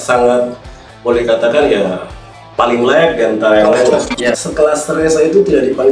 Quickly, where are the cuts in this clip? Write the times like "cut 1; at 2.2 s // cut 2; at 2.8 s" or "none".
cut 1; at 4.4 s